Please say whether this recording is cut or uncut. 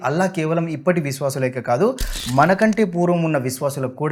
uncut